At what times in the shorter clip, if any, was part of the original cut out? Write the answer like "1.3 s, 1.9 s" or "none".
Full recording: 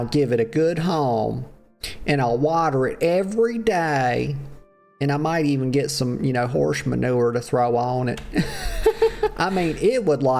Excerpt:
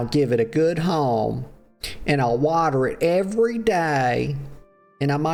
none

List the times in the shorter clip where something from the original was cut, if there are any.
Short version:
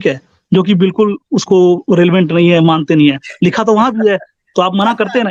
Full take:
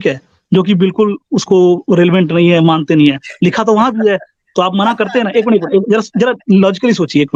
none

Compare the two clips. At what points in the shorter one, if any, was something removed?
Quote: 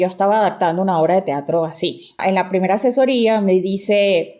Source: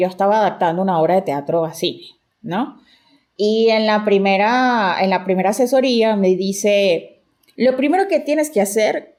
2.2 s

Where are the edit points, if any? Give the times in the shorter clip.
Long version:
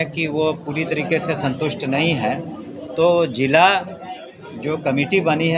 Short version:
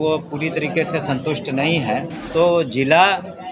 2.2 s

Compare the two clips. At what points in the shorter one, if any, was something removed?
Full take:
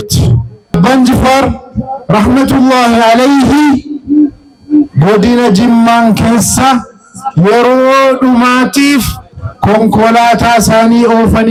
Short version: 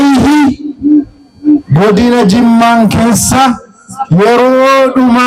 none

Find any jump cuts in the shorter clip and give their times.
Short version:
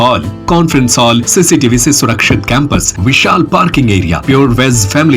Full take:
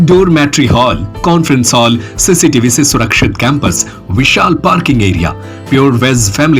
1.3 s, 2.9 s, 4.2 s

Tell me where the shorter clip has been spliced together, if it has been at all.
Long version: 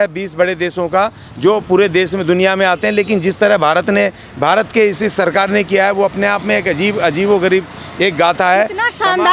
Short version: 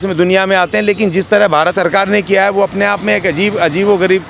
1.7 s

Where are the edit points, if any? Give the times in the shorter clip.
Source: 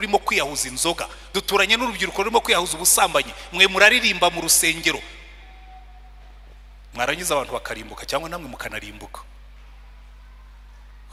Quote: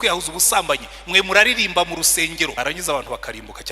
2.5 s

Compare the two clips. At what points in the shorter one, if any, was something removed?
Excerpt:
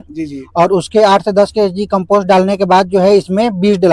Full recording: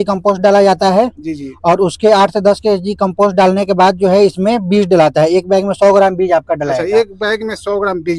none

